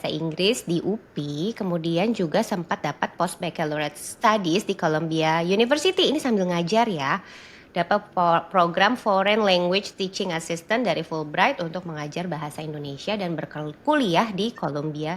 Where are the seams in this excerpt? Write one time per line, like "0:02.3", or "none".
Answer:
none